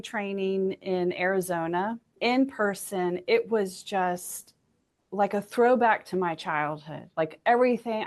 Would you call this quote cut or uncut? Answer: cut